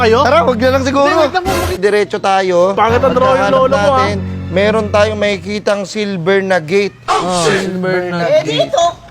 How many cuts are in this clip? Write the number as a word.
one